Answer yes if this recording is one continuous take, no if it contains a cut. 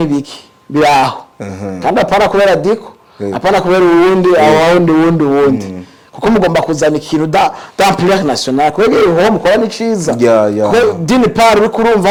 yes